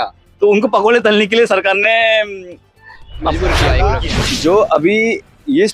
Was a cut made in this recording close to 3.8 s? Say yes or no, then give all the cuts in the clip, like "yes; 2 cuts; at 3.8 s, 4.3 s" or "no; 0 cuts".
yes; 1 cut; at 3.8 s